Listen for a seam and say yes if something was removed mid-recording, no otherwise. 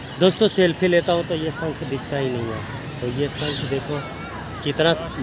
no